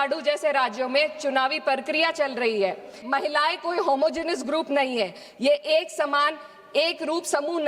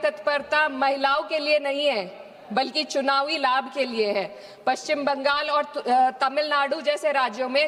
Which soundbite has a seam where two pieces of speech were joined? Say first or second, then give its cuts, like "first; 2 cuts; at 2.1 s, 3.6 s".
first; 1 cut; at 3.0 s